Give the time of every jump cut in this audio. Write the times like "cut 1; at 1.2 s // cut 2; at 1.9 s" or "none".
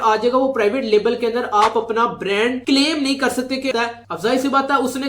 cut 1; at 3.7 s

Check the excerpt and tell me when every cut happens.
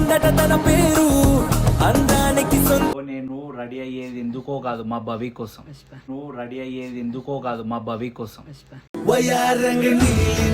cut 1; at 2.9 s

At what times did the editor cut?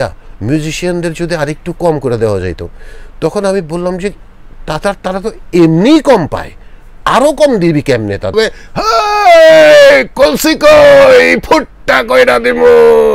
cut 1; at 8.3 s

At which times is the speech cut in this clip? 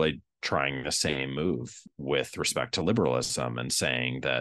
cut 1; at 1.8 s

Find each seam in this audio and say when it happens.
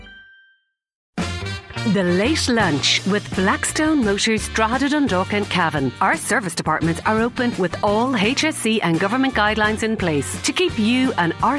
cut 1; at 1.1 s

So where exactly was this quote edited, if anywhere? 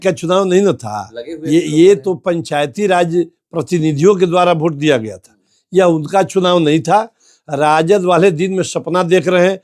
none

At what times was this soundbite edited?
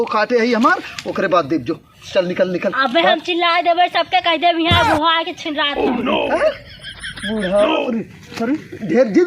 cut 1; at 7.7 s

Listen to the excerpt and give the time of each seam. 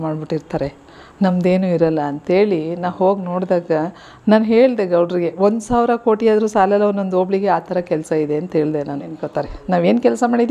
cut 1; at 9.2 s

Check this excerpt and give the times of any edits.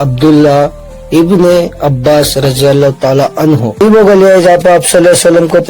cut 1; at 3.8 s

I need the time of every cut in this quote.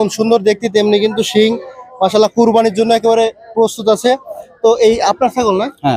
none

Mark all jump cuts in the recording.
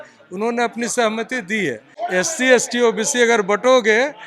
cut 1; at 1.9 s

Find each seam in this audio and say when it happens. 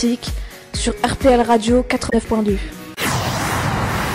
cut 1; at 2.1 s

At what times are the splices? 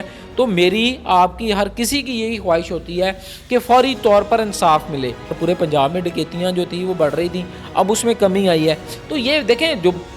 cut 1; at 5.4 s

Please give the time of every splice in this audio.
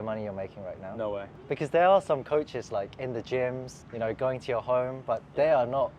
none

